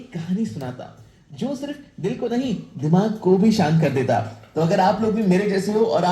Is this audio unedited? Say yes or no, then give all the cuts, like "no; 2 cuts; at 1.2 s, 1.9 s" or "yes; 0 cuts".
yes; 0 cuts